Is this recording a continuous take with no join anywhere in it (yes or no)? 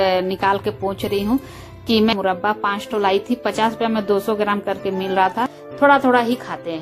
no